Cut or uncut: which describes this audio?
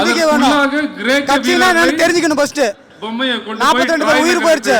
cut